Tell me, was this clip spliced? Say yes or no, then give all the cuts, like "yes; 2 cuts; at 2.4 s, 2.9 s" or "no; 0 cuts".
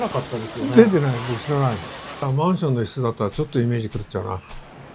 yes; 1 cut; at 2.3 s